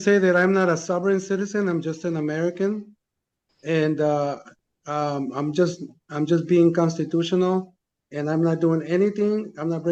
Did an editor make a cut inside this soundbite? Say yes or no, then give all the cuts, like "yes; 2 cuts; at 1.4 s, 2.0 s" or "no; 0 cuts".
no; 0 cuts